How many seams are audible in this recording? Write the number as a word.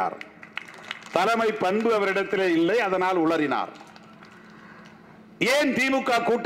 zero